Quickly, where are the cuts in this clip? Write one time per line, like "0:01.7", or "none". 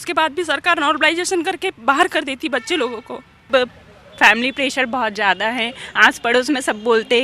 0:03.4